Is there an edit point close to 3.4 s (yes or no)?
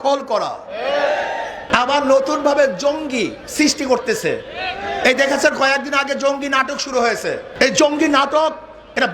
no